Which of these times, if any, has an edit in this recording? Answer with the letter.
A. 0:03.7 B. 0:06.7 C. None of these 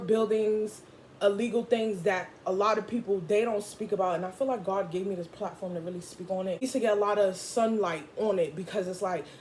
B